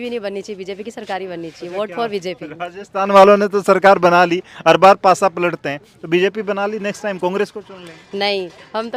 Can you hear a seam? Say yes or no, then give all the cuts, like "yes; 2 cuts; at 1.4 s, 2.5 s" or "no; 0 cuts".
no; 0 cuts